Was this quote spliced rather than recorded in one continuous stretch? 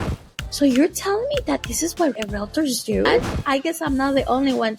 yes; 2 cuts; at 2.2 s, 3.3 s

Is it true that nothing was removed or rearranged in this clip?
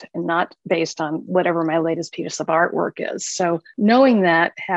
no; 1 cut; at 3.7 s

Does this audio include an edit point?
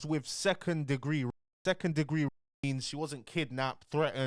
no; 0 cuts

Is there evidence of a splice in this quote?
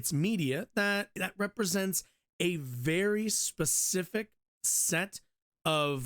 yes; 1 cut; at 1.2 s

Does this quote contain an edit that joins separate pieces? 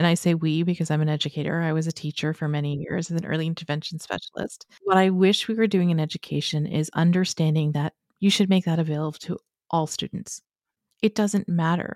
yes; 2 cuts; at 4.7 s, 10.3 s

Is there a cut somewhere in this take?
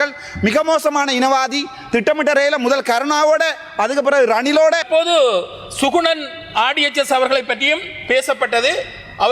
yes; 1 cut; at 4.9 s

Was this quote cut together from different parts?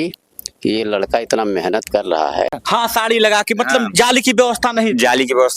yes; 1 cut; at 2.6 s

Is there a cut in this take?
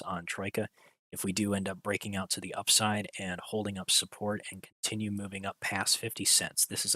no; 0 cuts

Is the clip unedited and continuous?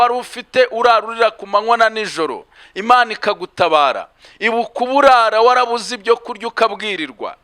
yes; 0 cuts

